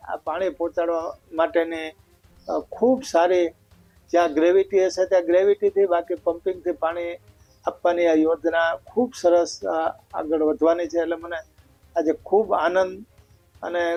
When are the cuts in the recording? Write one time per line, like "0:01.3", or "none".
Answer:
none